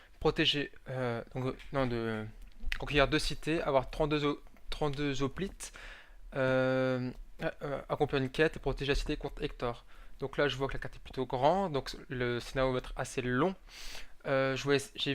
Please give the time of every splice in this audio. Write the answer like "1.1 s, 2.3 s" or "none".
6.4 s